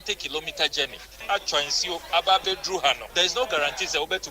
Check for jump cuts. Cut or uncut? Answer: cut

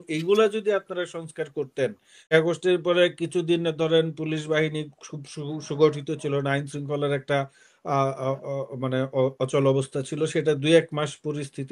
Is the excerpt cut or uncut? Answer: cut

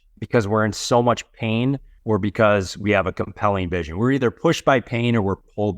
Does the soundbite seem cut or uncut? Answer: cut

